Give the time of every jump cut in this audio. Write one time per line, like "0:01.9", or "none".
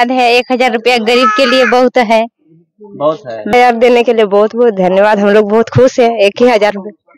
0:03.5